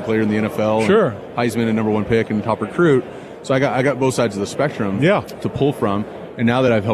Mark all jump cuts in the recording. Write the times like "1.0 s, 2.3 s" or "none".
none